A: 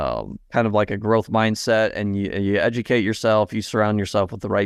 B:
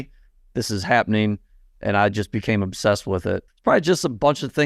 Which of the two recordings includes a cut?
B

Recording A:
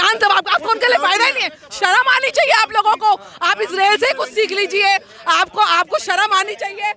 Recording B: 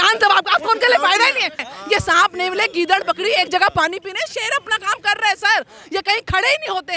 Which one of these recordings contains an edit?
B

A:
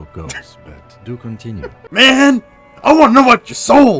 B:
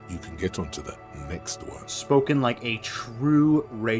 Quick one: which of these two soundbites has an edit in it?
A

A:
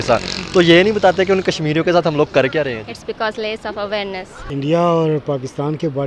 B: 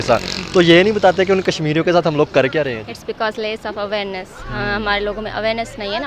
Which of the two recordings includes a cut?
A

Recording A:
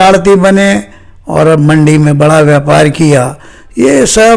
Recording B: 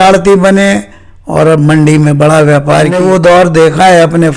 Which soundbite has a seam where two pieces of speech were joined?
B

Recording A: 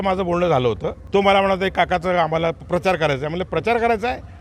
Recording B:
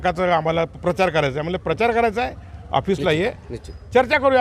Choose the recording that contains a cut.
A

